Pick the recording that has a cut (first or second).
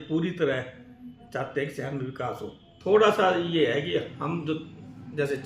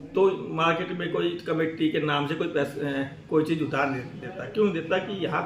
first